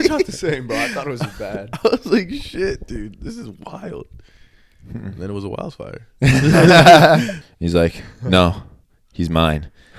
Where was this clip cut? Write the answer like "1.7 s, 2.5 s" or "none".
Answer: 7.4 s